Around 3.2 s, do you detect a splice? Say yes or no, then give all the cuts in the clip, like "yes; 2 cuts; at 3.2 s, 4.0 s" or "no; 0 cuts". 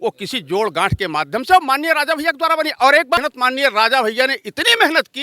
yes; 1 cut; at 3.2 s